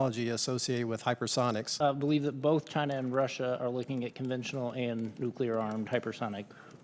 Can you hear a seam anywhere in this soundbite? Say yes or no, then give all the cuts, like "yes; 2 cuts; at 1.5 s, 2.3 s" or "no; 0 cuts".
yes; 1 cut; at 1.7 s